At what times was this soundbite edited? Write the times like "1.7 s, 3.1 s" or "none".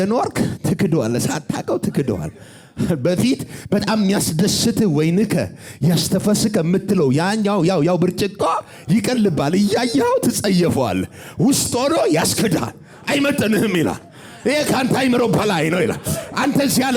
none

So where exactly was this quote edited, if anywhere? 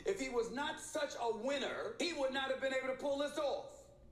1.9 s

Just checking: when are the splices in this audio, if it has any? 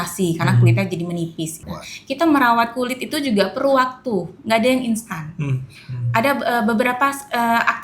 1.7 s

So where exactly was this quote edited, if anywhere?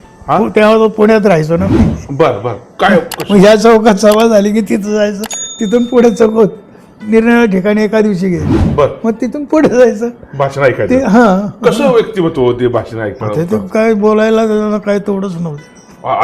none

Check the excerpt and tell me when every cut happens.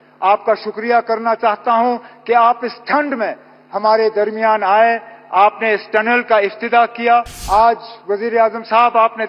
7.4 s

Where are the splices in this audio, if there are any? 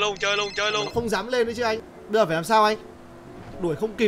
1.8 s

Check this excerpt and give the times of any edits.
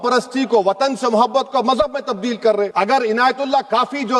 2.7 s

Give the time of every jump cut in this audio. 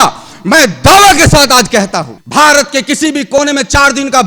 2.2 s

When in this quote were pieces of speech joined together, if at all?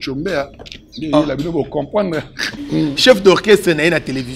2.7 s

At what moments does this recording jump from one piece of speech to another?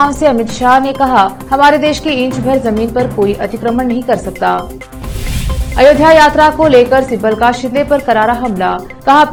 none

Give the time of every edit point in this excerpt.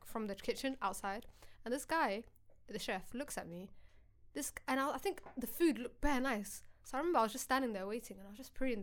none

